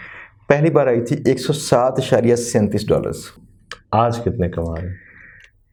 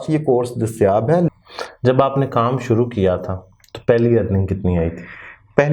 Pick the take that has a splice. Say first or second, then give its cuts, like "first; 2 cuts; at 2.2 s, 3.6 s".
second; 1 cut; at 1.3 s